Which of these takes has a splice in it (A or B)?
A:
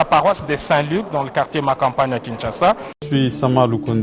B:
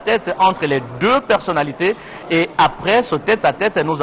A